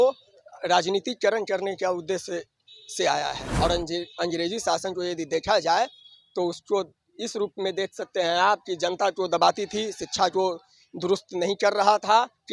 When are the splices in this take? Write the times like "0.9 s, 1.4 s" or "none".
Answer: 3.4 s

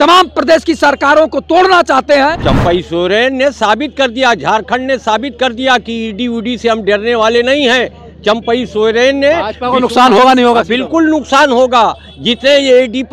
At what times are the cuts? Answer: 2.4 s

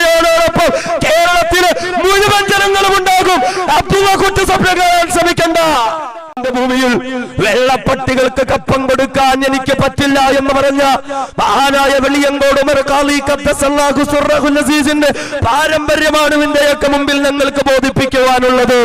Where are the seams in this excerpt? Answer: 6.4 s

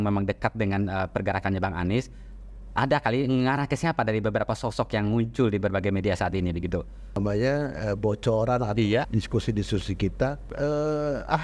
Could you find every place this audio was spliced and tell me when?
7.2 s, 9.1 s, 10.5 s

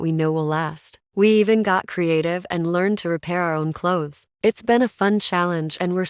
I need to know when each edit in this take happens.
4.3 s

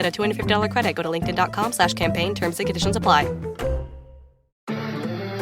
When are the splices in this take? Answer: 4.5 s

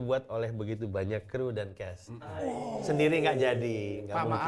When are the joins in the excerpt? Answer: none

